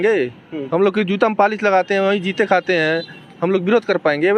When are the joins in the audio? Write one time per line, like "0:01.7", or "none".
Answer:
none